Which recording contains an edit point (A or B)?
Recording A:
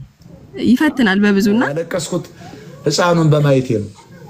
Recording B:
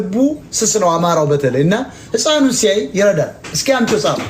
A